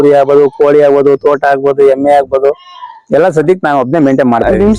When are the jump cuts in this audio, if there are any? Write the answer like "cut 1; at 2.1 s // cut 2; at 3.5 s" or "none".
none